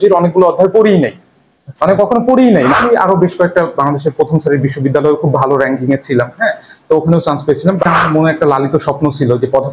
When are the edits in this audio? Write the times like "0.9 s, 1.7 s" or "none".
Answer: 2.8 s, 7.9 s

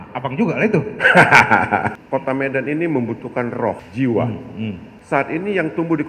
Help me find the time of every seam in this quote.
1.9 s, 3.8 s, 4.9 s

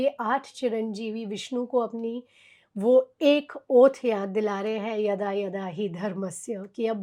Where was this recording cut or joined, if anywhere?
none

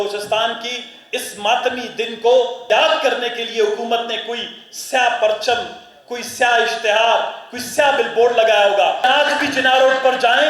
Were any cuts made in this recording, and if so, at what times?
2.6 s, 9.0 s

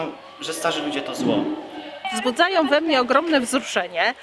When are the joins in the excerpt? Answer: 1.5 s

